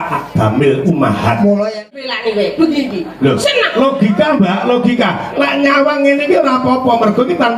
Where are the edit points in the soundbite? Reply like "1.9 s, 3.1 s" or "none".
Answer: 2.0 s